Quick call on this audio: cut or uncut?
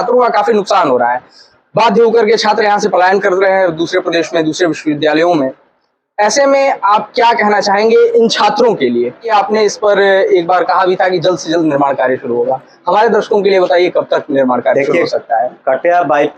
cut